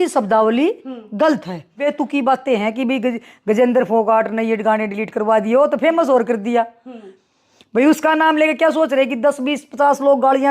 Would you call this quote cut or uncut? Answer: cut